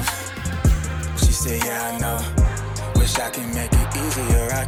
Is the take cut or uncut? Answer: uncut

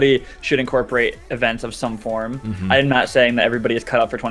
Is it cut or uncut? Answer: uncut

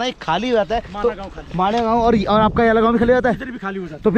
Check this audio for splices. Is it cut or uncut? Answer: uncut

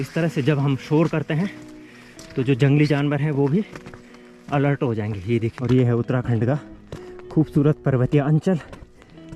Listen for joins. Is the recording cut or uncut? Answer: cut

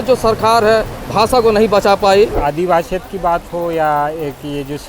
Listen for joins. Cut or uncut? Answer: cut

